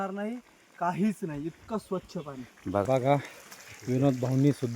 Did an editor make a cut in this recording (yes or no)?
yes